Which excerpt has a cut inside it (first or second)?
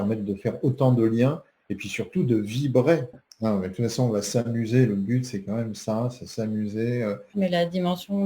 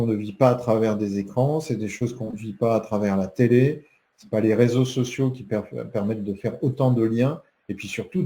first